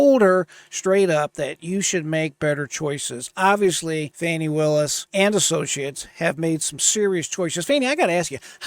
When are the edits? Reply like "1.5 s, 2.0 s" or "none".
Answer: 4.1 s, 5.0 s